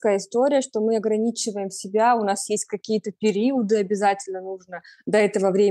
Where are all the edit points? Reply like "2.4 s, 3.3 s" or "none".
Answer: none